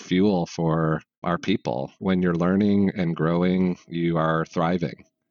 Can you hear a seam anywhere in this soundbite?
yes; 1 cut; at 1.2 s

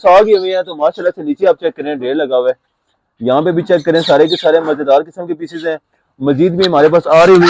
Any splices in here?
no; 0 cuts

